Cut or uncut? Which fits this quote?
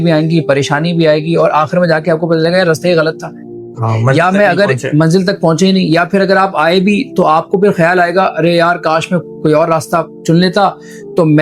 uncut